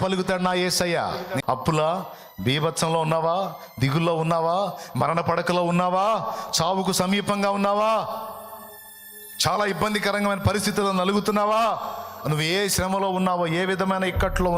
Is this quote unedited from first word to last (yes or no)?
no